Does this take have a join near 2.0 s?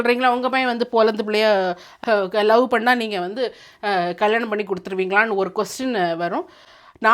yes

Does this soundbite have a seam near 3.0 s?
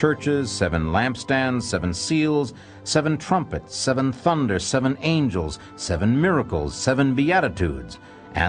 yes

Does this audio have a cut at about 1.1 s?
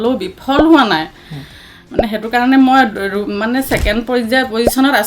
no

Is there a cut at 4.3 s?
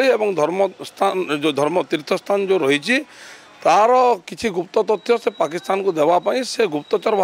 no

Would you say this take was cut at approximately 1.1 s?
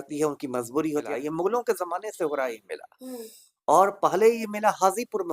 yes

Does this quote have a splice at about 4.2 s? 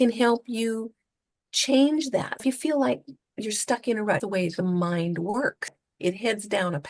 yes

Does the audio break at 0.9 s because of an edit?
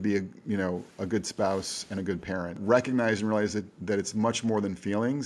no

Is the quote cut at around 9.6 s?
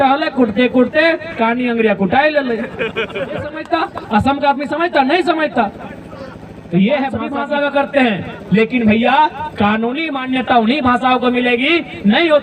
no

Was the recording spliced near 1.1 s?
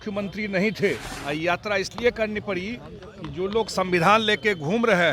yes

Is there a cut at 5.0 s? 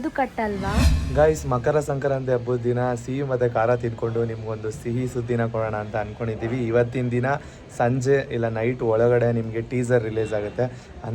no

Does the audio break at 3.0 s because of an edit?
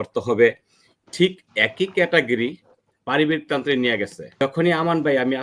no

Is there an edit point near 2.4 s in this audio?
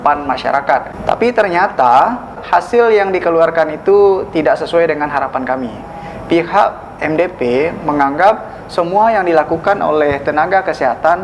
yes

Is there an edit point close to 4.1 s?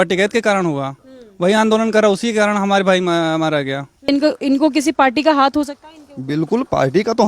yes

